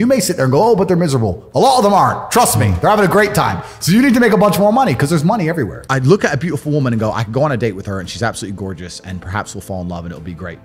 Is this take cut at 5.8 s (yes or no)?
yes